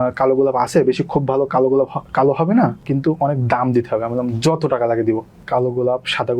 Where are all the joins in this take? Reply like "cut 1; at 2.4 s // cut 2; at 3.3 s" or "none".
cut 1; at 2.8 s // cut 2; at 5.4 s